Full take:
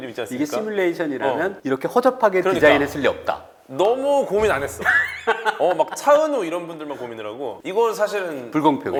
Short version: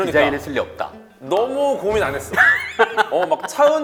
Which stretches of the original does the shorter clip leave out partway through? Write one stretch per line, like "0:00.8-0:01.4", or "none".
none

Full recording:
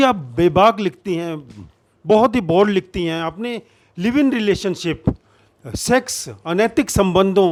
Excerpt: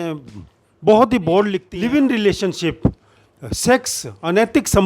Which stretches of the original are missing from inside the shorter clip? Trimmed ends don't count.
0:02.9-0:03.9

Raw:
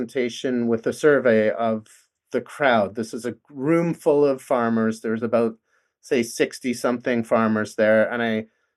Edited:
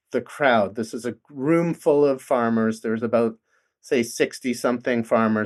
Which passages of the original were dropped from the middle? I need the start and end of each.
none

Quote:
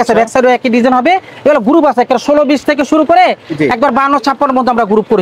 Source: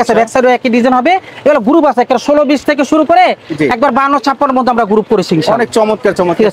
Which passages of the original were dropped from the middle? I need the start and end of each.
none

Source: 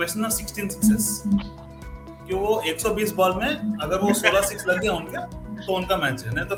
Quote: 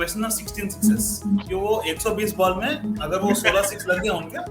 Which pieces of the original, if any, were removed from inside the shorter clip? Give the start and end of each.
0:01.5-0:02.3

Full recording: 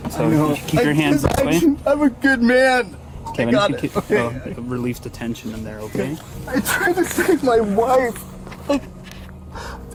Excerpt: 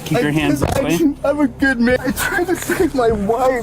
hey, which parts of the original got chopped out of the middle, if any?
0:02.6-0:06.4

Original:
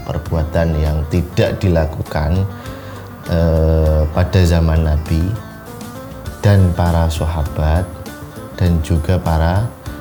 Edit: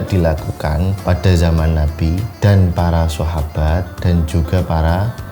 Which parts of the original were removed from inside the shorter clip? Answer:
0:02.5-0:04.1
0:05.4-0:06.3
0:07.9-0:08.5

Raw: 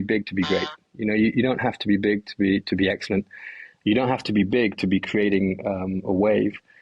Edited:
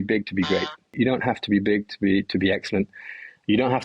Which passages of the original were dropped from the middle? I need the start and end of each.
0:01.0-0:01.3

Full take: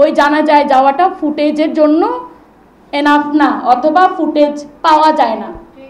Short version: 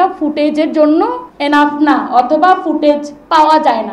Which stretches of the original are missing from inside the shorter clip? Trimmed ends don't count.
0:02.3-0:02.8

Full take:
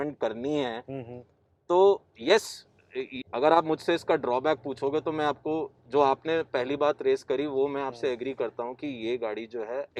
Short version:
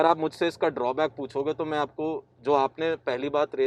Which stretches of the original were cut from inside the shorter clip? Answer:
none

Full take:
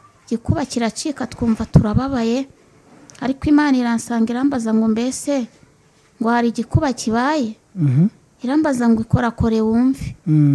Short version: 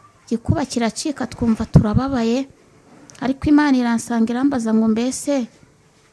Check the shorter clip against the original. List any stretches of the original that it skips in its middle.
none

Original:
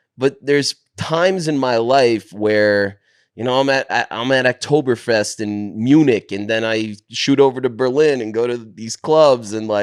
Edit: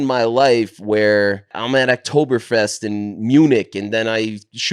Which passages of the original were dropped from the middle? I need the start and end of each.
0:03.1-0:04.1

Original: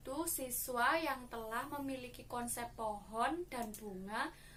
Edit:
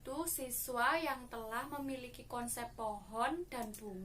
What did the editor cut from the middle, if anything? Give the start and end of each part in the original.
none

